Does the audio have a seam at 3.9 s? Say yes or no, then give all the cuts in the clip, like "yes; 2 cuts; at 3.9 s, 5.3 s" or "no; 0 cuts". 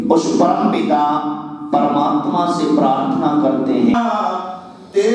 yes; 1 cut; at 3.9 s